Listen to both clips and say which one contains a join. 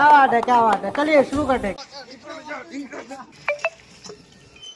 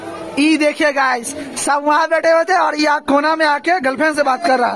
first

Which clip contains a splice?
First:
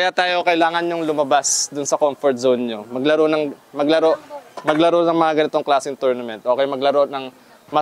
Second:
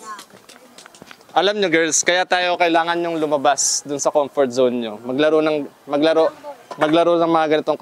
second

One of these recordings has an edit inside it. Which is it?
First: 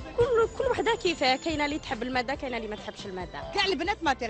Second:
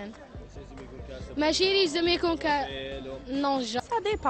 first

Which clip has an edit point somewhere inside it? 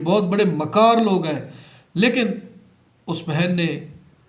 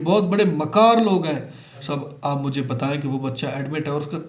second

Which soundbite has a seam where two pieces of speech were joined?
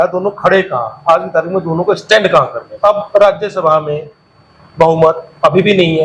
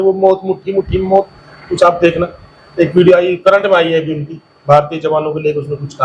first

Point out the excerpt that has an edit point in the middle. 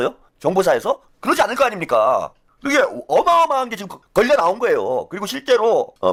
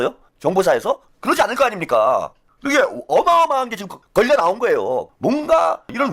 second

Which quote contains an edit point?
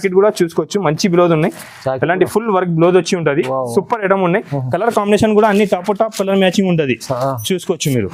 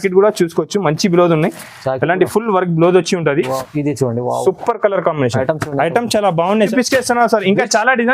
second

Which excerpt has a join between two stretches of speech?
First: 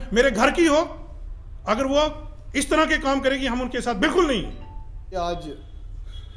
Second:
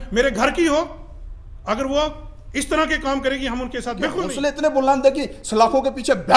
second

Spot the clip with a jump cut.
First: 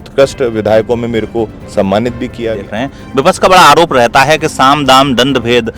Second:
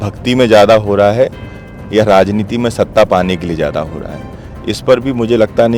first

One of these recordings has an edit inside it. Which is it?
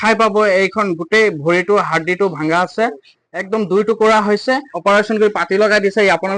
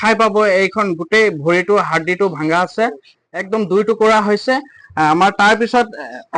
first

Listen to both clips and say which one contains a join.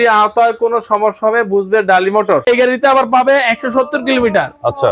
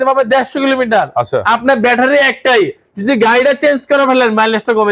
first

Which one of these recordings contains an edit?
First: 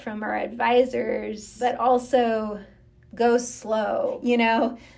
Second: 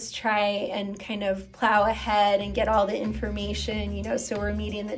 first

